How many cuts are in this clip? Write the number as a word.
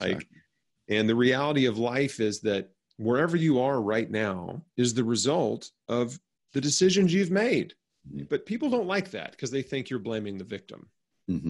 one